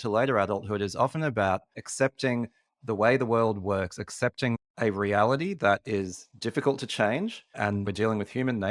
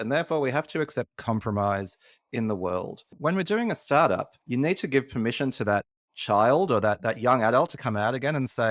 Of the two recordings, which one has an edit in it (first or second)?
second